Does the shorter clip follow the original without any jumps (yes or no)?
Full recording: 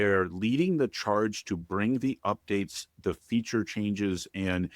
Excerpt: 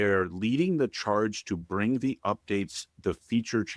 yes